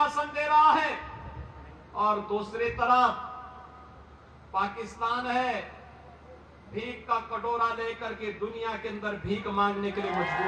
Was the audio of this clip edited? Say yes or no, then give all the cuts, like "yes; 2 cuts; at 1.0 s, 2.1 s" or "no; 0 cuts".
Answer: no; 0 cuts